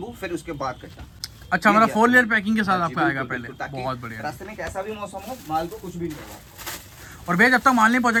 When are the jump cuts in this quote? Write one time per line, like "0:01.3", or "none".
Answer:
none